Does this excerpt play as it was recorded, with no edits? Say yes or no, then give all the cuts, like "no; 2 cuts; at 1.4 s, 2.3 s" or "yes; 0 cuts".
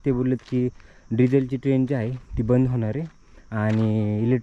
yes; 0 cuts